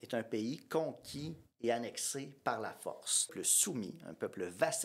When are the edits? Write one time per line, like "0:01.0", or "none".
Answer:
0:03.3